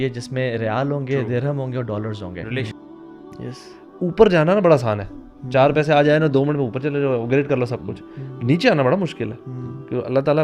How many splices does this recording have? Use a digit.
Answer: 1